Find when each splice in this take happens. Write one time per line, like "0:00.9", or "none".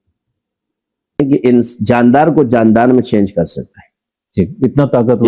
0:01.2

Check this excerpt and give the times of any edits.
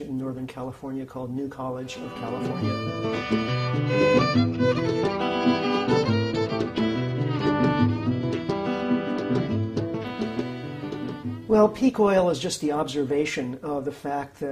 0:06.0

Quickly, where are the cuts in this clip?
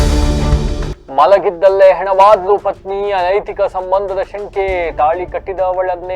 0:00.9

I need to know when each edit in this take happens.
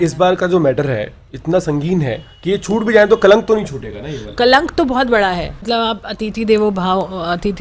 0:05.6

